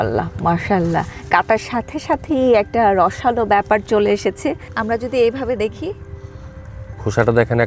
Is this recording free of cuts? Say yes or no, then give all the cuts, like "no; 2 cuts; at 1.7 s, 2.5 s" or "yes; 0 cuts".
no; 1 cut; at 4.7 s